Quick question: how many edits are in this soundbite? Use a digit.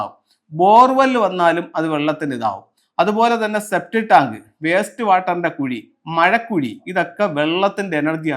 1